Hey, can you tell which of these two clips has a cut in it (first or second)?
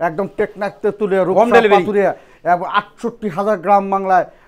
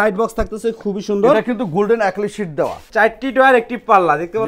second